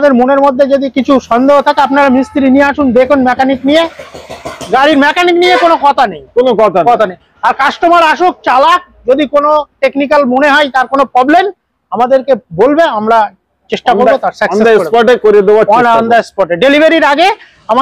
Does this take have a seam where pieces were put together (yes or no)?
no